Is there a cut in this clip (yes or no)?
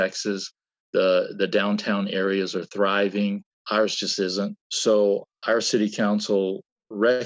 yes